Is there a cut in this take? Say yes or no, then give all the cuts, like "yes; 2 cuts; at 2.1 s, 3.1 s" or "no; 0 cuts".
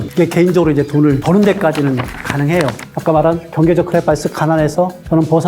yes; 1 cut; at 2.8 s